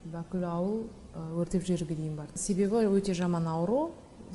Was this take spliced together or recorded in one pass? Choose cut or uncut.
cut